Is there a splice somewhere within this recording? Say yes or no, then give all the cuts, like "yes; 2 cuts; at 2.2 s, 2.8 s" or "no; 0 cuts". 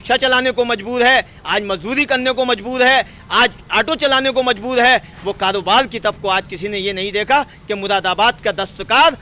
no; 0 cuts